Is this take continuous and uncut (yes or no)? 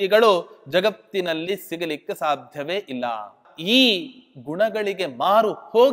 no